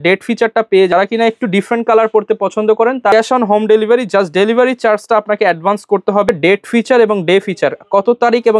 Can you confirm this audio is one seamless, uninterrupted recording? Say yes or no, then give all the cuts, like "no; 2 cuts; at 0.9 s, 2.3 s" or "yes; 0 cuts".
no; 3 cuts; at 0.9 s, 3.1 s, 6.3 s